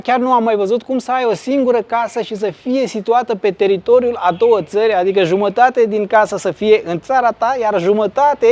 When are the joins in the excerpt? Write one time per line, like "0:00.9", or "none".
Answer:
none